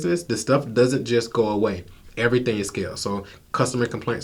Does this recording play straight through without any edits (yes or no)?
yes